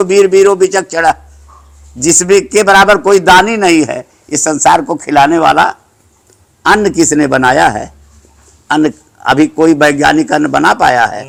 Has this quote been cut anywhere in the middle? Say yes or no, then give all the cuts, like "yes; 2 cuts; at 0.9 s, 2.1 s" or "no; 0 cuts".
no; 0 cuts